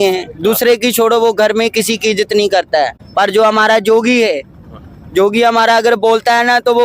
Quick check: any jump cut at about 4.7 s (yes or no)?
no